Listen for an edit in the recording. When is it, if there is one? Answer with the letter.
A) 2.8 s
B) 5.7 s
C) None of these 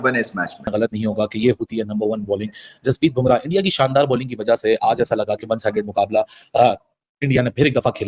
C